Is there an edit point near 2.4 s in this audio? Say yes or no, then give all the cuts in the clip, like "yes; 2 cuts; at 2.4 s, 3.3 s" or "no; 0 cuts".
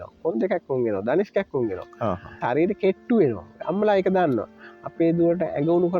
yes; 1 cut; at 2.4 s